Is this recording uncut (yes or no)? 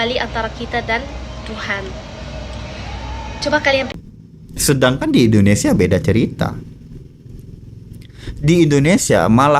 no